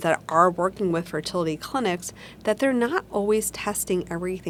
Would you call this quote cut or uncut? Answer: uncut